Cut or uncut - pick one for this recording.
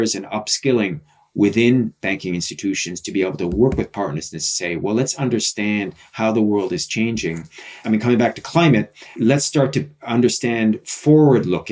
cut